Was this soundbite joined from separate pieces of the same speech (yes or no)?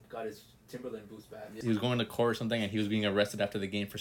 yes